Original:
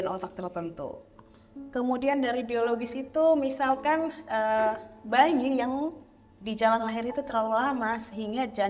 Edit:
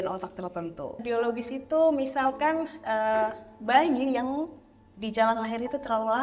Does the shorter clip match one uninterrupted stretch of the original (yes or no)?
no